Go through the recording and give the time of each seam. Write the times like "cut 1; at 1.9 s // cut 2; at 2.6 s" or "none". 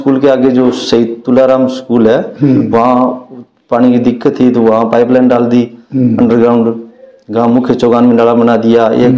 none